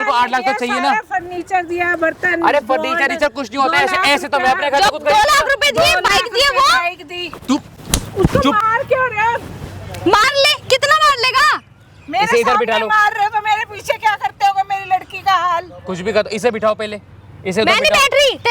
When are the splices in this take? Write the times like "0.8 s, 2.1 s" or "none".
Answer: none